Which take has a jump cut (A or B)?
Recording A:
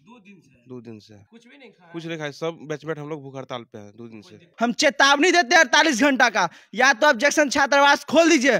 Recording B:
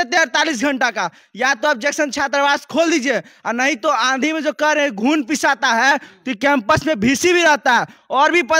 A